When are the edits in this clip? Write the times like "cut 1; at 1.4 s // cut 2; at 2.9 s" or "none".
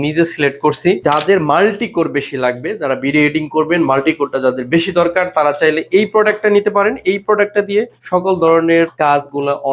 cut 1; at 1.0 s // cut 2; at 8.0 s // cut 3; at 8.9 s